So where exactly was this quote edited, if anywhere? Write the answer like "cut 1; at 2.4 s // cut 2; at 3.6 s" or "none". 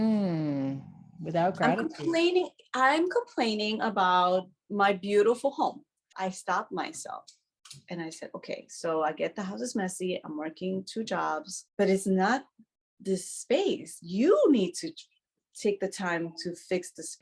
cut 1; at 6.0 s // cut 2; at 11.6 s

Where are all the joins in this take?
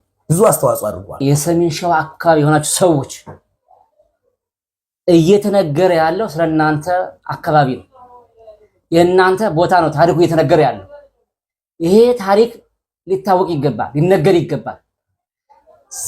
cut 1; at 1.2 s

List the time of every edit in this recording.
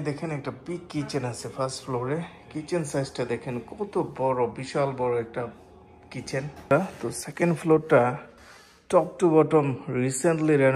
cut 1; at 6.7 s

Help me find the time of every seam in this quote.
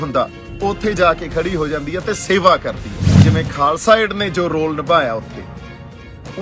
cut 1; at 3.2 s

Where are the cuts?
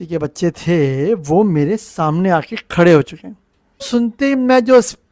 cut 1; at 3.9 s

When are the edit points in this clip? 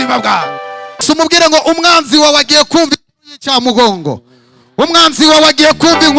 cut 1; at 1.0 s

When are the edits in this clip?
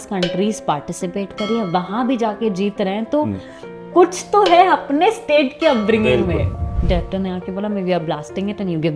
cut 1; at 6.5 s

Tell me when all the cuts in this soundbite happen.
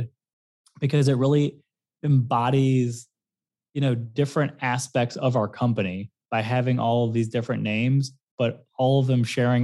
none

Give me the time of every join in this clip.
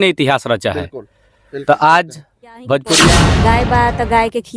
cut 1; at 3.2 s

